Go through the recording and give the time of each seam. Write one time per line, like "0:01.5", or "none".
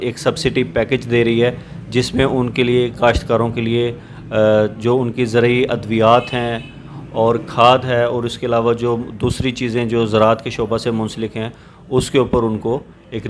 none